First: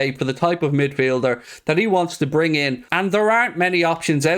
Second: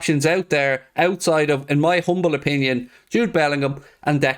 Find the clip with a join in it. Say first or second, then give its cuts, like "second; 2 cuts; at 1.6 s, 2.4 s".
first; 1 cut; at 2.9 s